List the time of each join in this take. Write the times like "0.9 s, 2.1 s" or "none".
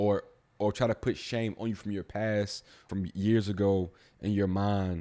2.7 s